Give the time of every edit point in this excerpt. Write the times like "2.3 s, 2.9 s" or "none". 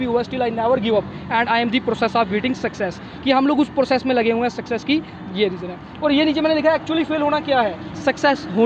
none